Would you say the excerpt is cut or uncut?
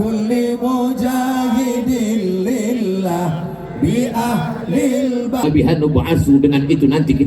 cut